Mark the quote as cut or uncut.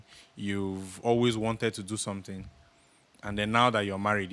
uncut